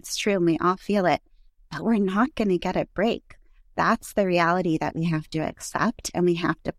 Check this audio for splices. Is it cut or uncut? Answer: uncut